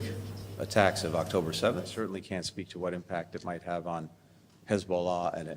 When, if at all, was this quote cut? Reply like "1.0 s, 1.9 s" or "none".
2.0 s